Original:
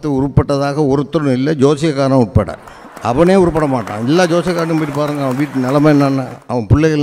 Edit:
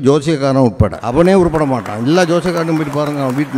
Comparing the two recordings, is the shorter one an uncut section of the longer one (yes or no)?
no